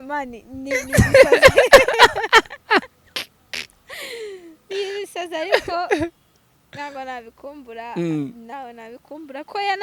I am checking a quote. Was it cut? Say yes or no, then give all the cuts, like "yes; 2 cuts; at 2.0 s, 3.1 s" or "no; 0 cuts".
no; 0 cuts